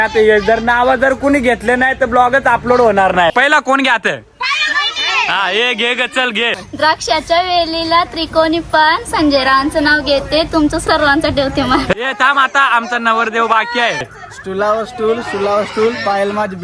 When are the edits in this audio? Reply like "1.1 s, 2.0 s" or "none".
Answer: 3.3 s, 6.6 s, 11.9 s